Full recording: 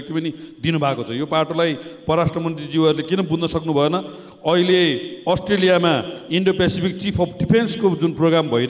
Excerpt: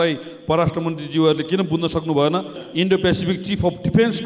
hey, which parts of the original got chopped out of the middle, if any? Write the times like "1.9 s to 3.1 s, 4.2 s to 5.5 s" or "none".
4.2 s to 6.2 s